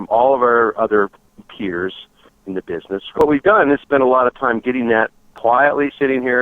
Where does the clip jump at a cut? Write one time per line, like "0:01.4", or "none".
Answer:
0:01.3
0:03.2
0:05.2